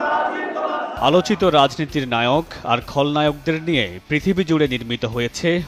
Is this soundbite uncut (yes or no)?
yes